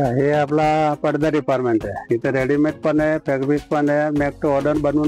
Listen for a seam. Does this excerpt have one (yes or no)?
no